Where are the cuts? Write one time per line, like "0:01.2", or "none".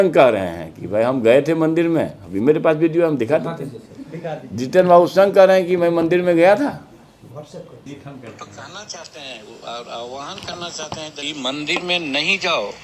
none